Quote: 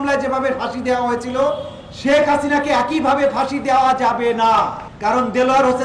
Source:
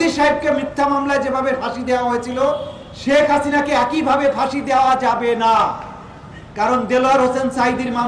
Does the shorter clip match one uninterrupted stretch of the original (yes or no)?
no